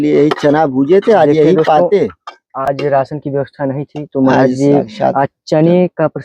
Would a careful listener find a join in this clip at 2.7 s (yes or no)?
no